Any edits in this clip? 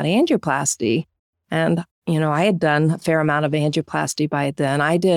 no; 0 cuts

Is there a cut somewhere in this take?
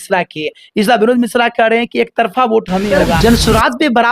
yes; 1 cut; at 2.9 s

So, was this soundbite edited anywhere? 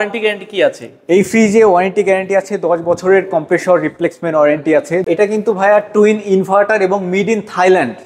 yes; 1 cut; at 5.1 s

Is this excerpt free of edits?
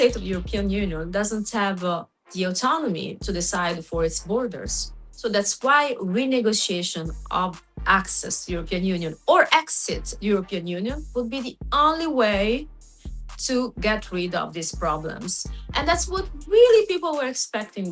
yes; 0 cuts

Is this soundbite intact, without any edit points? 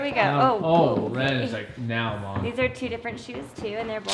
yes; 0 cuts

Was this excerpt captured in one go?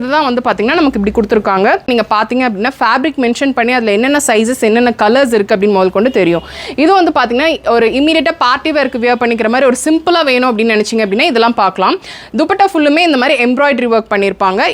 no; 1 cut; at 1.9 s

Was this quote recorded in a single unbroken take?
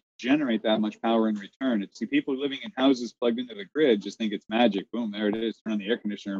no; 1 cut; at 2.0 s

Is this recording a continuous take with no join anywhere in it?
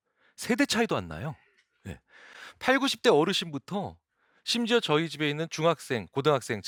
yes; 0 cuts

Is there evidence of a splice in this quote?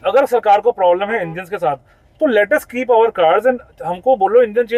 no; 0 cuts

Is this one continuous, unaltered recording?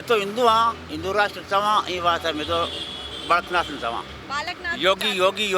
yes; 0 cuts

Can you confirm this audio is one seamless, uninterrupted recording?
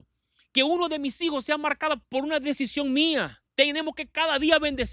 no; 1 cut; at 3.4 s

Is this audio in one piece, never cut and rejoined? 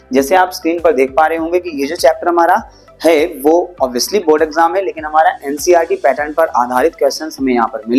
yes; 0 cuts

